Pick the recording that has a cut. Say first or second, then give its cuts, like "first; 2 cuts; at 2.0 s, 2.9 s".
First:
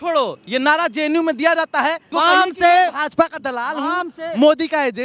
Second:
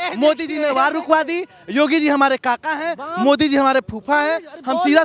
first; 1 cut; at 2.0 s